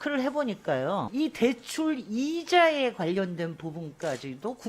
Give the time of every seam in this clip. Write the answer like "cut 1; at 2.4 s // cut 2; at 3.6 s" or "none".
cut 1; at 1.1 s